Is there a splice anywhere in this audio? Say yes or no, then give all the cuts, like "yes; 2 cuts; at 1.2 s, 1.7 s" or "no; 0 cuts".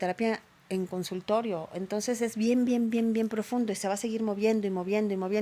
no; 0 cuts